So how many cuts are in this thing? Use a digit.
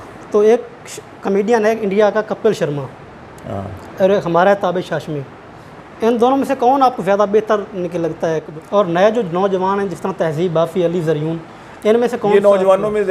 1